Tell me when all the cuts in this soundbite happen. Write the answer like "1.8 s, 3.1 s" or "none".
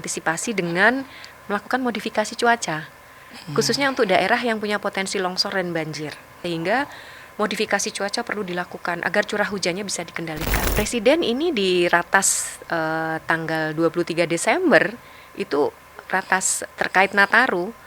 6.4 s, 10.5 s